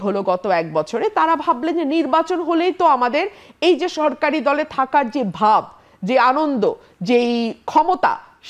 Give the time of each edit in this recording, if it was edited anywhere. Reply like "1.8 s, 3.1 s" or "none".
none